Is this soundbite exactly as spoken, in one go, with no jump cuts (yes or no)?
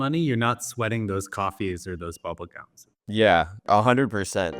no